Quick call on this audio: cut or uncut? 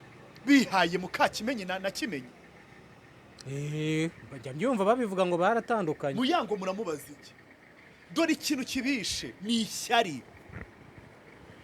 uncut